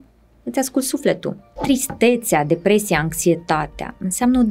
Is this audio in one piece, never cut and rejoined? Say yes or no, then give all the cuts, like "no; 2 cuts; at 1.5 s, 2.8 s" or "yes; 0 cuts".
no; 1 cut; at 1.6 s